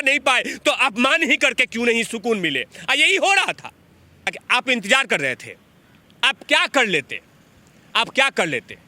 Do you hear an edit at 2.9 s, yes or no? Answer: no